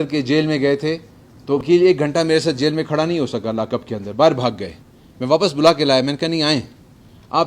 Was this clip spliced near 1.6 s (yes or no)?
yes